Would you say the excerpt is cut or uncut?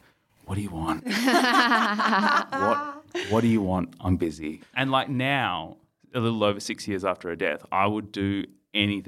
cut